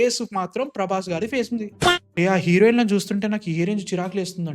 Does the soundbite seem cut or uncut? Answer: cut